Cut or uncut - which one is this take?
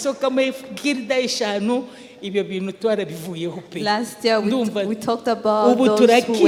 uncut